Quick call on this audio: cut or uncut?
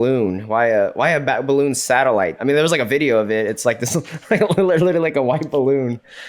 cut